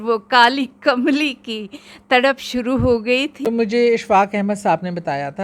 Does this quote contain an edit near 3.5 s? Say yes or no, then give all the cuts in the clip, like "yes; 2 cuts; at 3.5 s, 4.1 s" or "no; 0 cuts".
yes; 1 cut; at 3.5 s